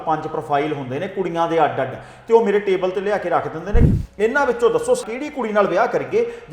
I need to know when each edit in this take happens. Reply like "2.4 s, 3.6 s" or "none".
3.8 s, 5.0 s